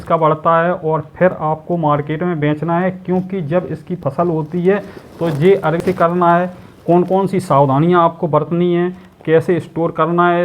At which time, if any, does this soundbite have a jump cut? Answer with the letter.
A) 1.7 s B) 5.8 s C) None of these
B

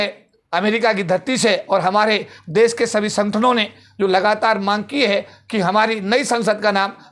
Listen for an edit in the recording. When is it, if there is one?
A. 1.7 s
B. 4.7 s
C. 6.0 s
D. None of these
D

